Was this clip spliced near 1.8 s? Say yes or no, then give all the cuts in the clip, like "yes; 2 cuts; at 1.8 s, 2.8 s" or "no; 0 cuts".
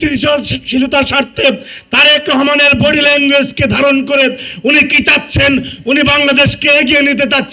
no; 0 cuts